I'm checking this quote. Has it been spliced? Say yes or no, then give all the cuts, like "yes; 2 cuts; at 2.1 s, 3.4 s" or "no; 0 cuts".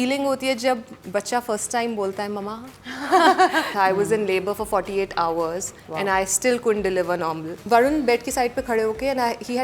yes; 2 cuts; at 3.7 s, 7.6 s